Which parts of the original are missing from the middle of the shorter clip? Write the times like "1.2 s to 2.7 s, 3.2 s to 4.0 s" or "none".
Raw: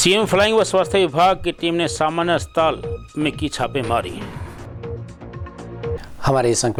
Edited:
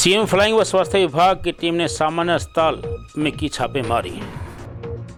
none